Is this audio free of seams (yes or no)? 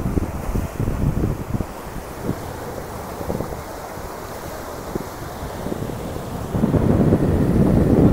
yes